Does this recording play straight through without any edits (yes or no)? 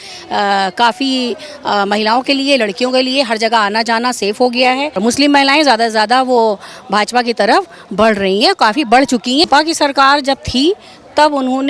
no